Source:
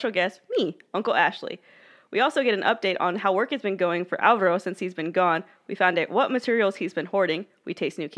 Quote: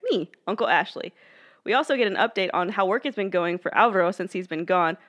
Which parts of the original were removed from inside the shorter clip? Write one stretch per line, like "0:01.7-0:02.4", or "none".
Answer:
none